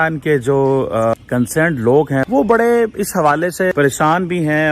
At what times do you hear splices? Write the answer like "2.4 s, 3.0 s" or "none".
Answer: 1.1 s, 2.3 s, 3.7 s